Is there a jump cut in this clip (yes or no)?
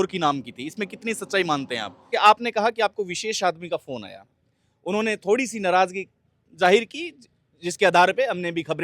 yes